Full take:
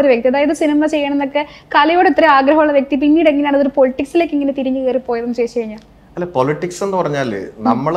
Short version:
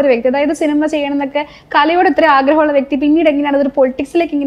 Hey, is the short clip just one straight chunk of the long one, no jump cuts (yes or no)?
yes